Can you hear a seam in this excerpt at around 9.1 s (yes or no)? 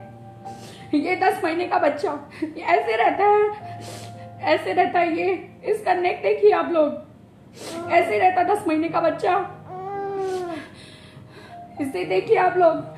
no